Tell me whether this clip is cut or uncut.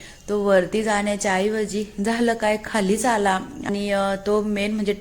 cut